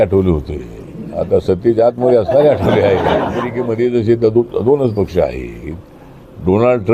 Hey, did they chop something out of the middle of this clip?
yes; 1 cut; at 3.6 s

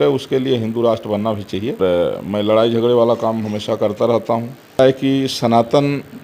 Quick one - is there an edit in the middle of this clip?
yes; 2 cuts; at 1.8 s, 4.8 s

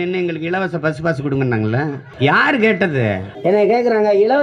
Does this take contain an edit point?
yes; 2 cuts; at 2.0 s, 3.3 s

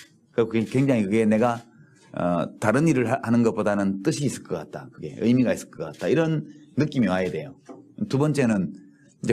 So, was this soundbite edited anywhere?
no; 0 cuts

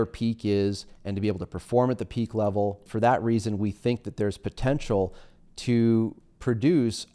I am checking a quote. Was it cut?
yes; 1 cut; at 2.8 s

